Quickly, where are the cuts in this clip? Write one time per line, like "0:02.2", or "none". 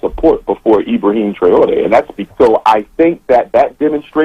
0:02.2